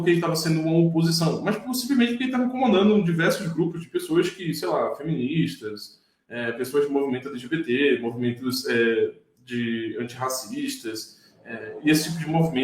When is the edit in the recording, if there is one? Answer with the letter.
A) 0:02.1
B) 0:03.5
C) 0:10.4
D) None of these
D